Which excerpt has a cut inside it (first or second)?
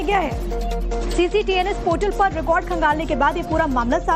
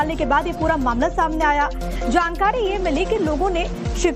second